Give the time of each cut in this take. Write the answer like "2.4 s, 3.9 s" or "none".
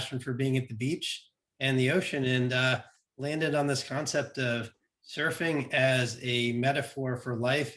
none